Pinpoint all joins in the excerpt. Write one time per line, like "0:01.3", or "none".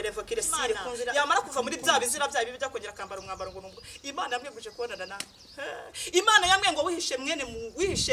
0:00.9